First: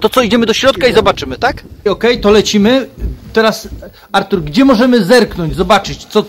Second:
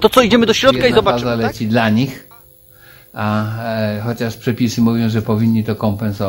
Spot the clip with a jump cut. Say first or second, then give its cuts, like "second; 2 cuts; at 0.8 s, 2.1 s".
second; 1 cut; at 1.2 s